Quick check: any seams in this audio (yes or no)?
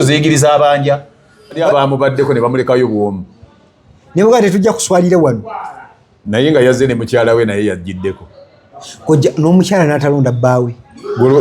yes